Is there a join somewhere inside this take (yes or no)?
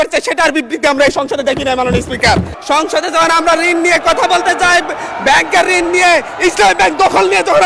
yes